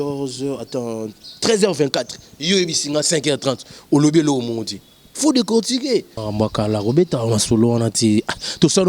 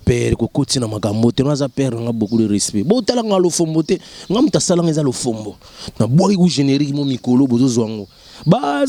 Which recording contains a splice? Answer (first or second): first